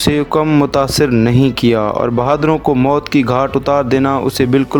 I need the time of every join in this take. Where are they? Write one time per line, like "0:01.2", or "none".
none